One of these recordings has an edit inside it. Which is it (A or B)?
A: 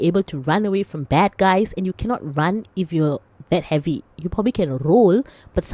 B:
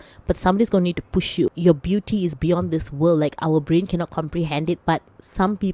B